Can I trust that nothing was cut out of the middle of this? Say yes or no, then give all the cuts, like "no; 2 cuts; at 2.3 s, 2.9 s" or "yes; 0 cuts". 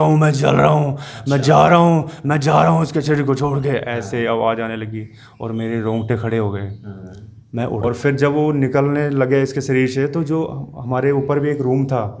no; 1 cut; at 7.8 s